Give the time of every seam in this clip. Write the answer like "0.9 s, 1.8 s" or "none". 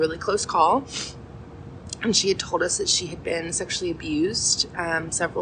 none